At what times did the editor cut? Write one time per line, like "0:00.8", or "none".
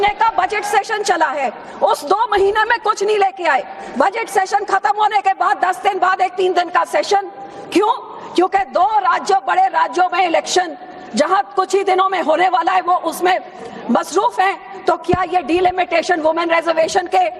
0:04.2